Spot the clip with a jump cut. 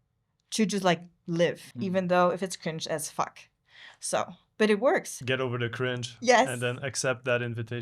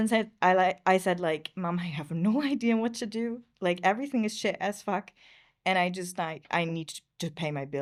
first; 2 cuts; at 1.7 s, 5.1 s

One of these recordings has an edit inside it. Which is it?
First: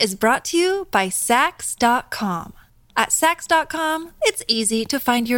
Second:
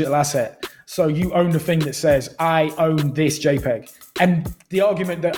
second; 1 cut; at 4.0 s

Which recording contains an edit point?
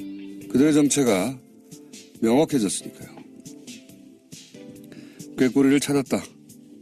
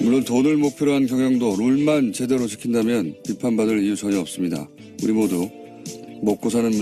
first; 1 cut; at 2.3 s

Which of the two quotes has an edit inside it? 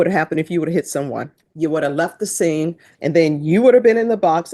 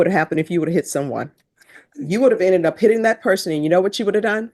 first; 2 cuts; at 1.4 s, 2.9 s

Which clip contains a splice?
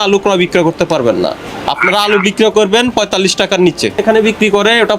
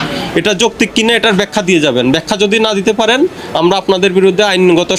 first; 1 cut; at 4.0 s

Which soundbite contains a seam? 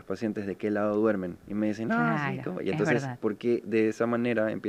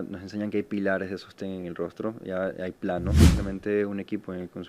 second; 1 cut; at 3.3 s

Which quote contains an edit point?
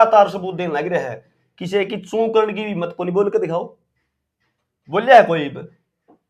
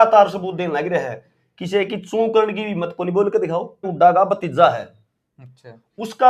second; 1 cut; at 3.9 s

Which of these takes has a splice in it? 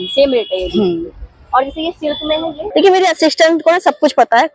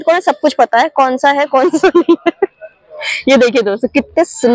first; 1 cut; at 2.6 s

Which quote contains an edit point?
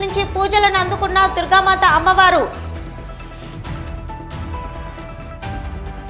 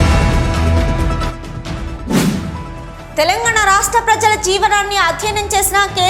second; 1 cut; at 1.3 s

